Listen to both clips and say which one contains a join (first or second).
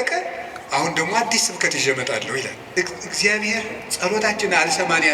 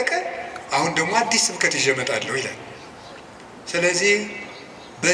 first